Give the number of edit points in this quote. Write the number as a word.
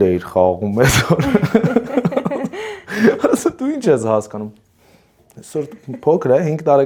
zero